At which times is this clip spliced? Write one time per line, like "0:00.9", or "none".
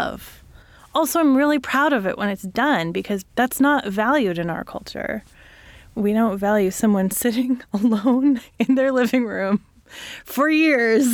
0:03.3
0:05.9